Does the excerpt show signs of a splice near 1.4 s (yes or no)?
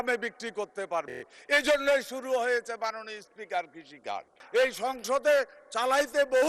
no